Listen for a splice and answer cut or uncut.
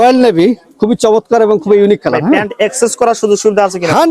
uncut